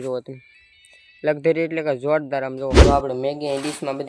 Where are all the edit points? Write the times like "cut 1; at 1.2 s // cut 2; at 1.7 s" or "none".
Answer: cut 1; at 2.8 s